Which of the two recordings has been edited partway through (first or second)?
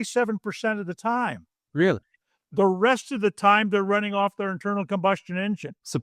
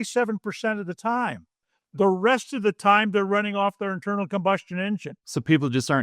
second